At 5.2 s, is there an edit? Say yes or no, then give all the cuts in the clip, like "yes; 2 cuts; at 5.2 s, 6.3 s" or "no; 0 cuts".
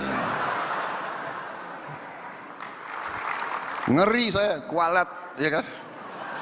no; 1 cut; at 3.0 s